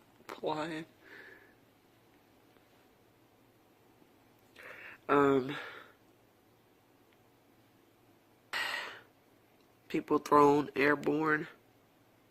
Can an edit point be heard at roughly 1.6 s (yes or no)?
no